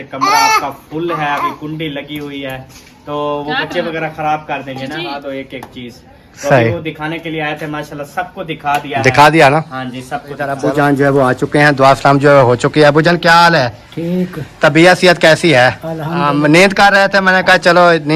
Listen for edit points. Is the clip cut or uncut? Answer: cut